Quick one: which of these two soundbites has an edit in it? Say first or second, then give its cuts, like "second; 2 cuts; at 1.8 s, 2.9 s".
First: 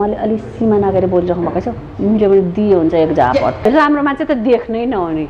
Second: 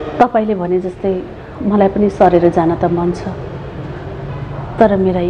first; 1 cut; at 3.7 s